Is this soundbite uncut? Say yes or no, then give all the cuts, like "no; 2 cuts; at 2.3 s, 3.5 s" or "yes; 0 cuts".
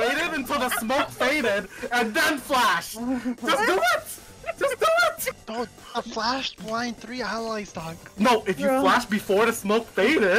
yes; 0 cuts